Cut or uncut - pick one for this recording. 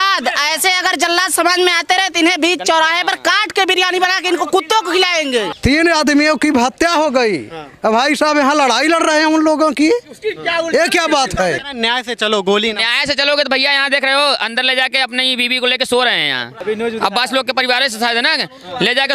cut